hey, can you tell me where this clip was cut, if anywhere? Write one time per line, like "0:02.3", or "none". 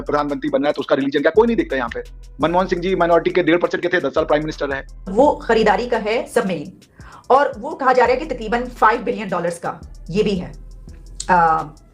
0:05.1

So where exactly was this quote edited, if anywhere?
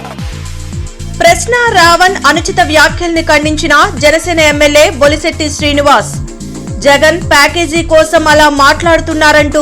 0:00.9

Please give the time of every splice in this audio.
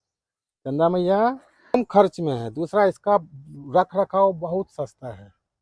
0:01.8

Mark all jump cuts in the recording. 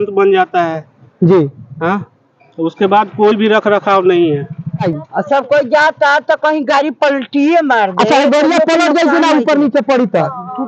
0:04.9

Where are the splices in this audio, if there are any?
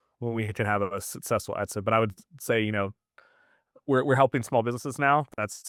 none

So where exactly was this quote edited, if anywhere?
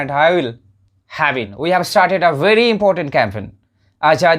0:01.5

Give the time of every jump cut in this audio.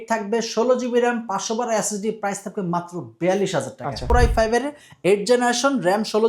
0:04.0

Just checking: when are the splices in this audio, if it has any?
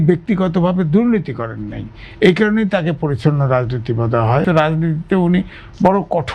0:04.5

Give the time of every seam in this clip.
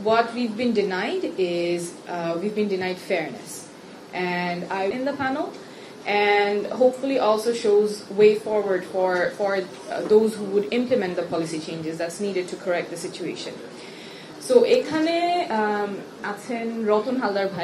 0:04.9

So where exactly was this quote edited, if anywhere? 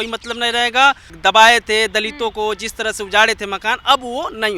0:01.1

